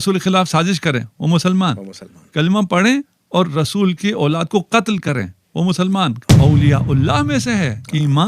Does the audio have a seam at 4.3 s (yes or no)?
no